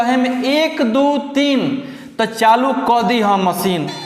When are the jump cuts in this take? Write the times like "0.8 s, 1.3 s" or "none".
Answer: none

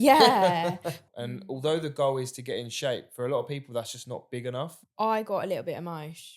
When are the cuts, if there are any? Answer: 1.0 s, 4.8 s

